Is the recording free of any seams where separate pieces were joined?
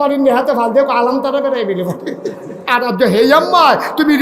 no; 1 cut; at 2.6 s

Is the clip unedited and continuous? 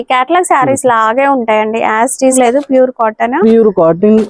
no; 1 cut; at 2.3 s

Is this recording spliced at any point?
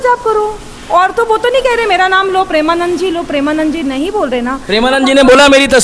no; 0 cuts

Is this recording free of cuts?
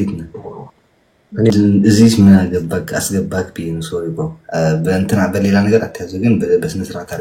no; 1 cut; at 1.5 s

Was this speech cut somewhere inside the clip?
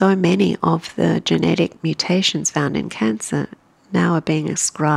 no; 0 cuts

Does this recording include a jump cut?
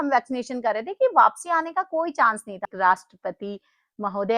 yes; 1 cut; at 2.6 s

